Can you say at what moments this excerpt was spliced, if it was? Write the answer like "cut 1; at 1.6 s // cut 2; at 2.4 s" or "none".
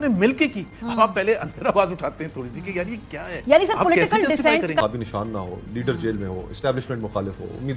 cut 1; at 4.8 s

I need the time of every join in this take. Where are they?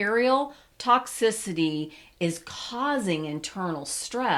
none

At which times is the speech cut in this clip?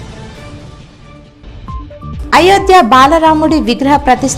cut 1; at 2.2 s

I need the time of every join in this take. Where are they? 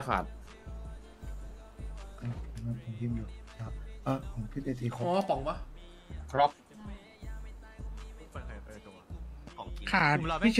none

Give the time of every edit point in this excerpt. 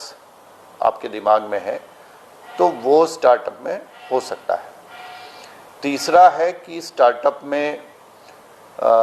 none

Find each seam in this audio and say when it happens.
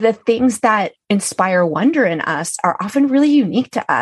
cut 1; at 1.0 s

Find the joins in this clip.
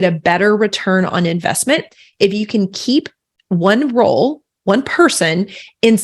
none

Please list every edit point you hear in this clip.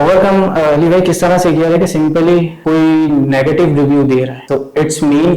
cut 1; at 2.5 s // cut 2; at 4.4 s

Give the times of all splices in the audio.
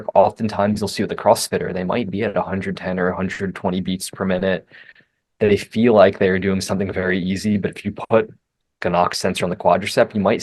none

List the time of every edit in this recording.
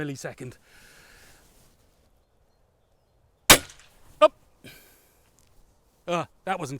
cut 1; at 2.3 s

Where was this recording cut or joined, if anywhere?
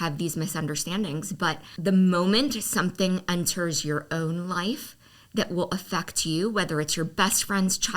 cut 1; at 1.7 s

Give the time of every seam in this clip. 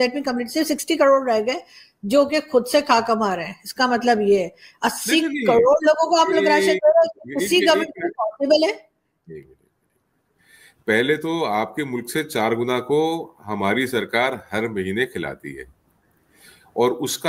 none

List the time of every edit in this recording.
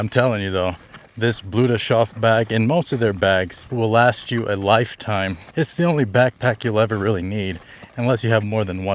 cut 1; at 3.6 s // cut 2; at 5.4 s

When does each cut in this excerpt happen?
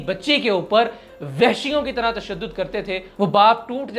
cut 1; at 3.1 s

